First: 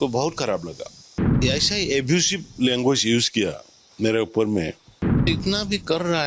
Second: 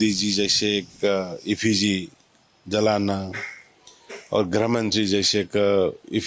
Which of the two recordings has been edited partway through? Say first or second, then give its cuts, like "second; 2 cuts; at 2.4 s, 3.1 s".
first; 2 cuts; at 1.4 s, 5.2 s